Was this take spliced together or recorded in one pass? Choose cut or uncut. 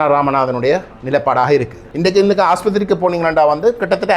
cut